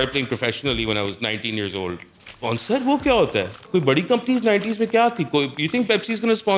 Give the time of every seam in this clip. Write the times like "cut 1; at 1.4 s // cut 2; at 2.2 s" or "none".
cut 1; at 2.3 s // cut 2; at 3.7 s